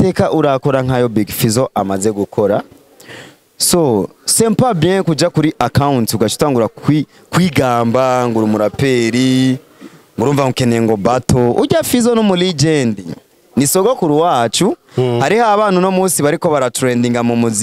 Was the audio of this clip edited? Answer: no; 0 cuts

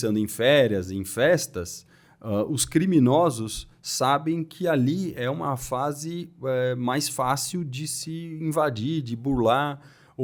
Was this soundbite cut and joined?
no; 0 cuts

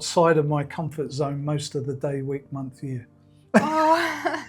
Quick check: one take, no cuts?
yes; 0 cuts

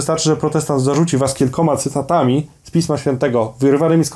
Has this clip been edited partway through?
no; 0 cuts

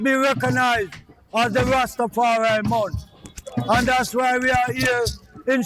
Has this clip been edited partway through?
no; 0 cuts

